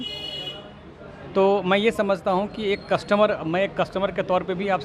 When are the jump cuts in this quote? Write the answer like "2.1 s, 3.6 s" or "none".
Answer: none